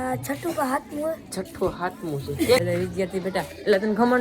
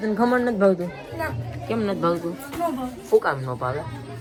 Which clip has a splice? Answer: first; 1 cut; at 2.6 s

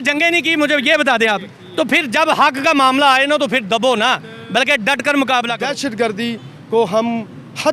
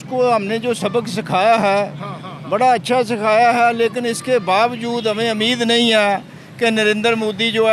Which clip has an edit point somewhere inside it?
first; 1 cut; at 5.6 s

